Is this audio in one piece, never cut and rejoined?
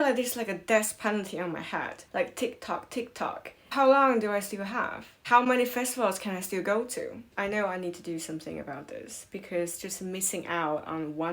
yes; 0 cuts

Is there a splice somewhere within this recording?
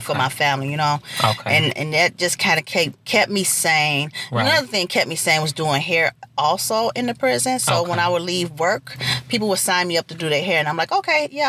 no; 0 cuts

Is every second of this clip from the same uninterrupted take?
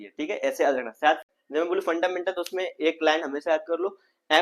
no; 1 cut; at 1.2 s

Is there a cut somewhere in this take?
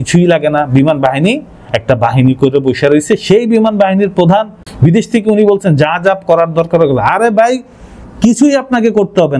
yes; 1 cut; at 4.6 s

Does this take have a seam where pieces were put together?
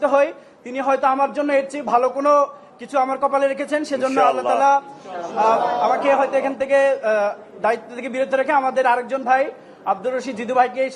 no; 0 cuts

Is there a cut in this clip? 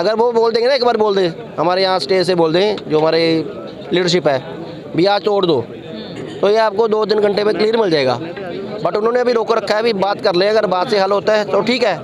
no; 0 cuts

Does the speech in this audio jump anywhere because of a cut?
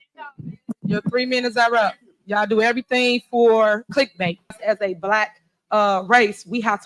yes; 1 cut; at 4.6 s

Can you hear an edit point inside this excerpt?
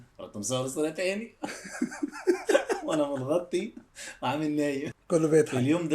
yes; 1 cut; at 5.0 s

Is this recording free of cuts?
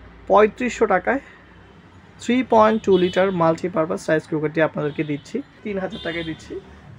no; 1 cut; at 5.6 s

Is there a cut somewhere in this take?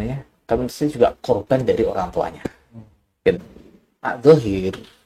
yes; 1 cut; at 3.3 s

